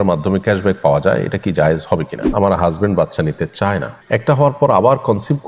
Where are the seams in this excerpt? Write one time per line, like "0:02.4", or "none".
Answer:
0:02.3
0:03.9